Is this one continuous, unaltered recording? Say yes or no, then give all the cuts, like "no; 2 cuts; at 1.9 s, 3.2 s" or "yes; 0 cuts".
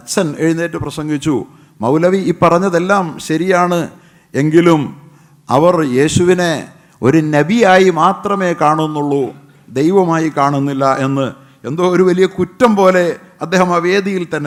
yes; 0 cuts